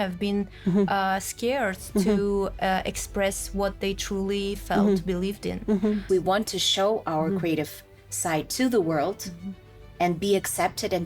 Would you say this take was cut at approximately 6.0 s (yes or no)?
yes